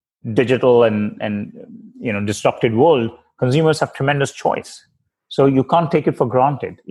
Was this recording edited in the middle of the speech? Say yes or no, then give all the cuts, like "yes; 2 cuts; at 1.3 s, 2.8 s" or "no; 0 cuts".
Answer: no; 0 cuts